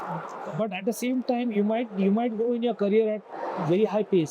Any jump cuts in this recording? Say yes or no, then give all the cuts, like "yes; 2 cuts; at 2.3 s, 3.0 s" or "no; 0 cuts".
no; 0 cuts